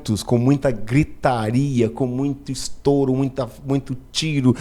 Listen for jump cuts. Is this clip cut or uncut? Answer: uncut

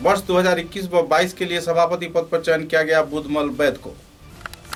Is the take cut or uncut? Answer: uncut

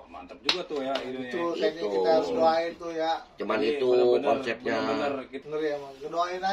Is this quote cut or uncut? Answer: cut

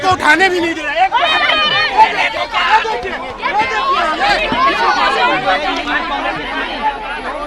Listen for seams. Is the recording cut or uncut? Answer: uncut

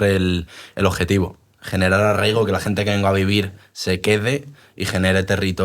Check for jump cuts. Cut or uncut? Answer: uncut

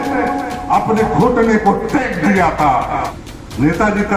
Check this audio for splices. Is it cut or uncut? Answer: cut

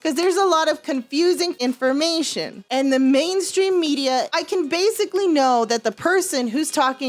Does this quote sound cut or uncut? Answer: cut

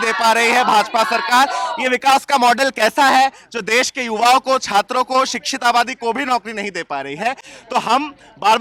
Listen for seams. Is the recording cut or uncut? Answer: uncut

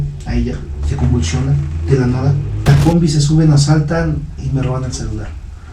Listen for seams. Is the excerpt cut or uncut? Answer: cut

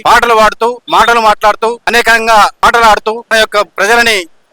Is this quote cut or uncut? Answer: cut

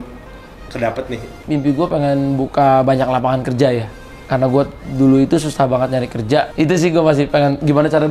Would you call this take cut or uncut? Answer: cut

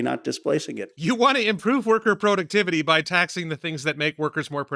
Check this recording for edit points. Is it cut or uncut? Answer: uncut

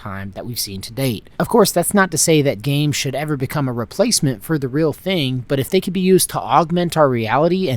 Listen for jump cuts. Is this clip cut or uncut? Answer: cut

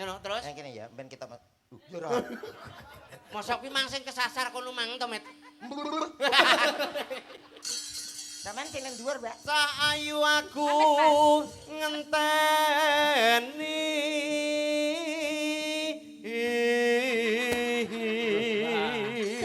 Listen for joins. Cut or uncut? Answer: uncut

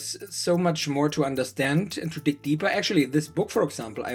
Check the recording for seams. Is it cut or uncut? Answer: uncut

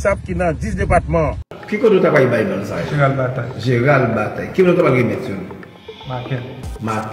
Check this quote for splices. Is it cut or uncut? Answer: cut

